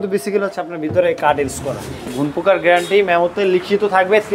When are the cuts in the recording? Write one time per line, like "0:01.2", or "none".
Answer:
0:02.0